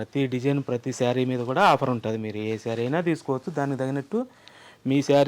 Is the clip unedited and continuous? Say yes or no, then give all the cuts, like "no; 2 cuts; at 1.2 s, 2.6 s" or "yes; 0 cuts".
yes; 0 cuts